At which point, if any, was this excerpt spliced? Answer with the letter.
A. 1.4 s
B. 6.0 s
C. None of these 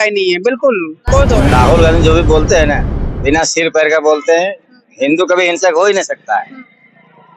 A